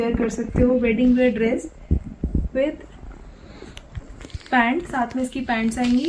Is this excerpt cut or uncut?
uncut